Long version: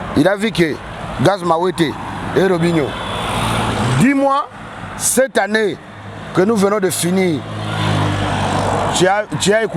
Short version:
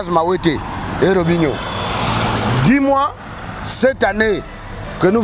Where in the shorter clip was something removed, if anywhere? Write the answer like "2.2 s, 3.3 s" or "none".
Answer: none